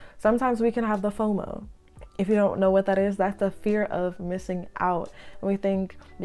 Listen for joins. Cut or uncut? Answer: uncut